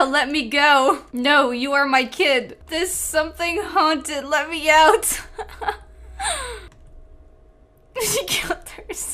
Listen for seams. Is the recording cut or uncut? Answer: uncut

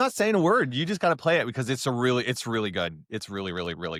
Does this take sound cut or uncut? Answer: uncut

